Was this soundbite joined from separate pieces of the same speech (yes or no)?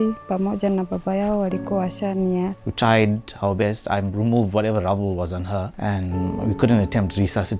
yes